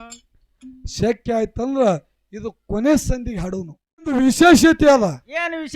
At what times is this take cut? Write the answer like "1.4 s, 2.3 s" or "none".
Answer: 4.2 s